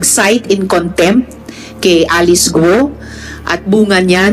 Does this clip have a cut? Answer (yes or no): no